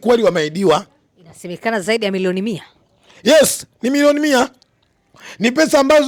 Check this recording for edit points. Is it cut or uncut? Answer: uncut